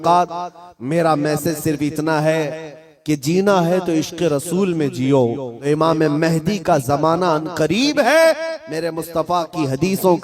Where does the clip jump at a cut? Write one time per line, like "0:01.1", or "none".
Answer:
0:05.5